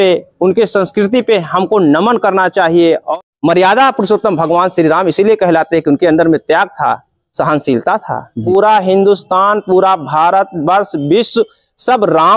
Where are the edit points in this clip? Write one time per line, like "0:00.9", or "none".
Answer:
0:03.1
0:08.4